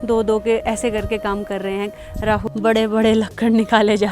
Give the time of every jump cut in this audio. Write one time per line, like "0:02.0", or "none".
0:02.4